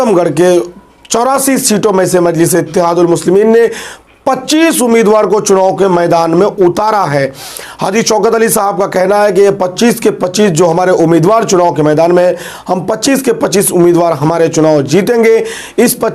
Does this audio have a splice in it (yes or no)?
no